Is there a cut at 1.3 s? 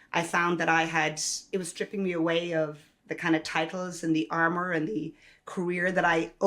yes; 1 cut; at 1.3 s

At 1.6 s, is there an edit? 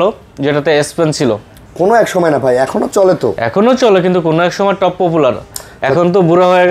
no; 0 cuts

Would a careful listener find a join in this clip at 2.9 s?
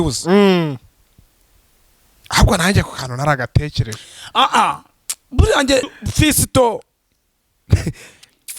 no; 1 cut; at 5.9 s

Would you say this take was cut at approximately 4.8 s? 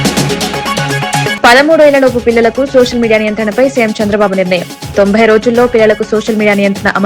no; 1 cut; at 1.3 s

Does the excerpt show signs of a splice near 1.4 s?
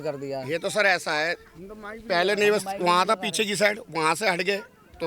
no; 0 cuts

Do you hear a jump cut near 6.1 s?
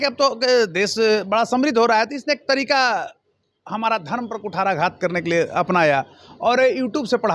no; 0 cuts

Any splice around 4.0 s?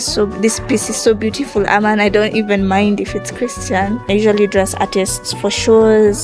yes; 1 cut; at 4.0 s

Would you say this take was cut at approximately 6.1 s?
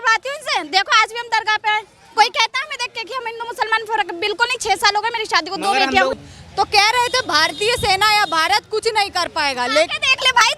yes; 1 cut; at 6.1 s

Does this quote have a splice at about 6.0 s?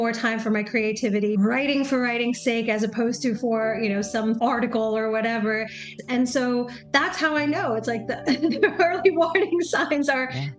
yes; 3 cuts; at 1.4 s, 4.4 s, 6.0 s

